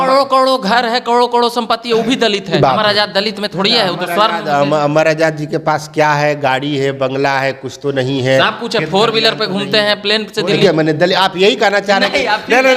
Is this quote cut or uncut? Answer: cut